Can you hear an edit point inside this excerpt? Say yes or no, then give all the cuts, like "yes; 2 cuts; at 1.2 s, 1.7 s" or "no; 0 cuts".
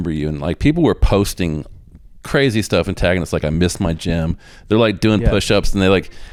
no; 0 cuts